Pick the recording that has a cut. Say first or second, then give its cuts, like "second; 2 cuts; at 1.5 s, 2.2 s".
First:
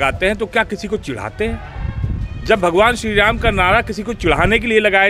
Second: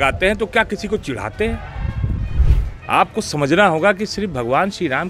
second; 1 cut; at 2.3 s